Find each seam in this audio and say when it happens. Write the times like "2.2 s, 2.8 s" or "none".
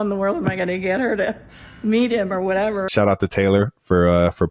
2.9 s